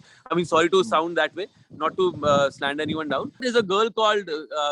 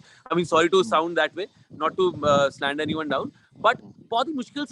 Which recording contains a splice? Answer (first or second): first